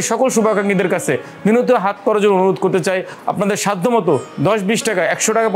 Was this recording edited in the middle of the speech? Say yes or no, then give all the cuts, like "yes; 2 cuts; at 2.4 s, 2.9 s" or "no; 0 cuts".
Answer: no; 0 cuts